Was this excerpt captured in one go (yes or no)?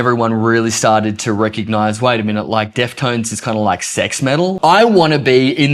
no